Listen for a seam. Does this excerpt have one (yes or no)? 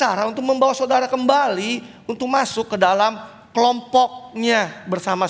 no